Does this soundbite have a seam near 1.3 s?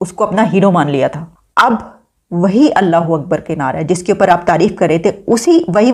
yes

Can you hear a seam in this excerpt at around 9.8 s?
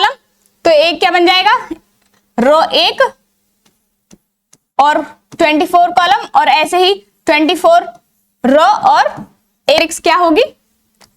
yes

